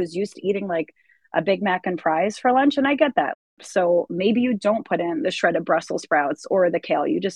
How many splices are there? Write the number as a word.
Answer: one